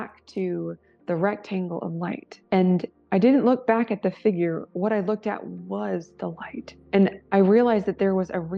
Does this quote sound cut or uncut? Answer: uncut